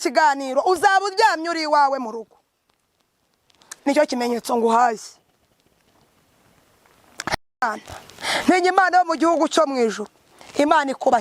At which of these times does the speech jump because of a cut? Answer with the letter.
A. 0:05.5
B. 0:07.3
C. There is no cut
B